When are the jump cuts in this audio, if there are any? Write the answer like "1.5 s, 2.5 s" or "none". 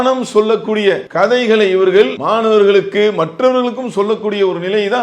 1.1 s, 2.2 s